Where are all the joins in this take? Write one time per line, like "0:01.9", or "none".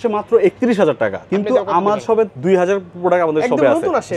0:01.2
0:02.4